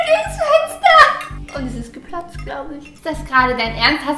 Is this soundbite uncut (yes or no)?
yes